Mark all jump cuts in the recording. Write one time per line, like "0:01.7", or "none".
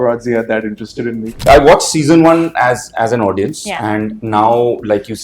0:01.4